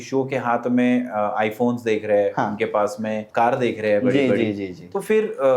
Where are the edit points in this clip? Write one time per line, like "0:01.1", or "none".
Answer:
0:03.3